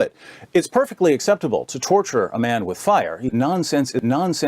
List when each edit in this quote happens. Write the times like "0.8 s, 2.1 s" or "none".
3.3 s